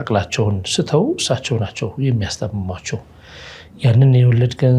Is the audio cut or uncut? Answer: uncut